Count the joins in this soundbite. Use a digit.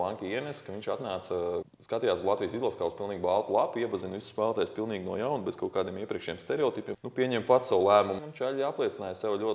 3